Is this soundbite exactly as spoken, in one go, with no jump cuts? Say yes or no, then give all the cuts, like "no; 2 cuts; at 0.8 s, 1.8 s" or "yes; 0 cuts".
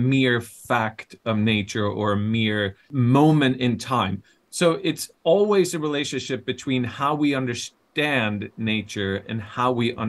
no; 1 cut; at 2.9 s